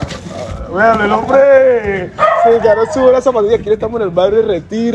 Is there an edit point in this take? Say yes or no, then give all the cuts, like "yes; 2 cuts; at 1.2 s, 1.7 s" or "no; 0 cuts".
no; 0 cuts